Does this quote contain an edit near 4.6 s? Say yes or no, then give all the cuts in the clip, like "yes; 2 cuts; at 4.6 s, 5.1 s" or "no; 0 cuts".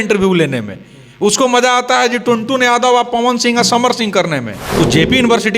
yes; 1 cut; at 4.6 s